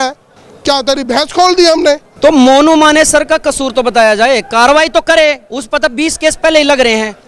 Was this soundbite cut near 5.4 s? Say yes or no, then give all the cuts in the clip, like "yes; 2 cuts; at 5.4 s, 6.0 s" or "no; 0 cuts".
no; 1 cut; at 2.1 s